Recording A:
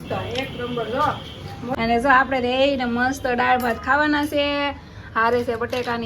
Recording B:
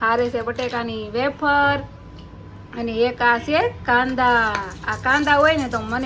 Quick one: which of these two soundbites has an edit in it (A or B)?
A